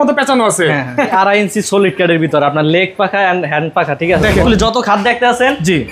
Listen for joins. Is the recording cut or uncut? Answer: cut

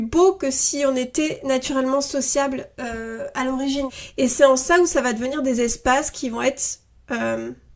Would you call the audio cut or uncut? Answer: cut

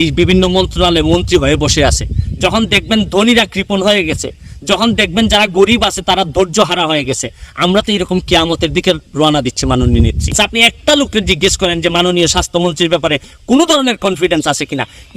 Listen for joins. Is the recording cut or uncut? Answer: cut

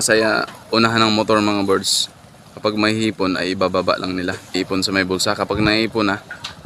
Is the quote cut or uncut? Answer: cut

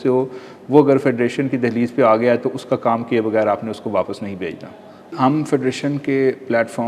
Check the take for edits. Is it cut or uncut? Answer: cut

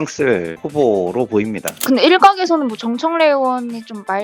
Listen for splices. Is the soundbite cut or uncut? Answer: cut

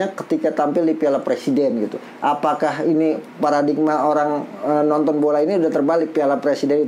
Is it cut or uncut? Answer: uncut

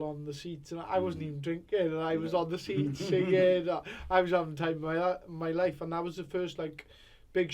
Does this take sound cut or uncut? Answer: uncut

